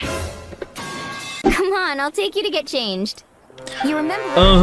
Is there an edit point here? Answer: yes; 1 cut; at 1.3 s

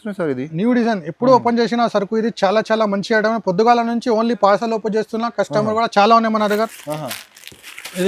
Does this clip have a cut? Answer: no; 0 cuts

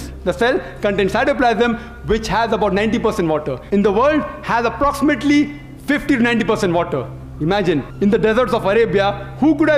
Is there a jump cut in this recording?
yes; 2 cuts; at 3.5 s, 7.9 s

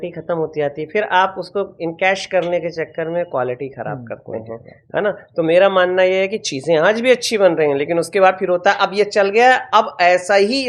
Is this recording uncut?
yes; 0 cuts

